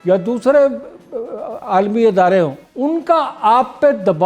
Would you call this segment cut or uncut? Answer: cut